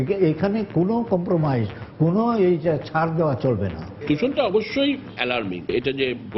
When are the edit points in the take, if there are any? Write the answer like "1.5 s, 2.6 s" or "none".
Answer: 3.9 s